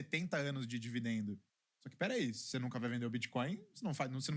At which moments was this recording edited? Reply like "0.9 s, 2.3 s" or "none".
none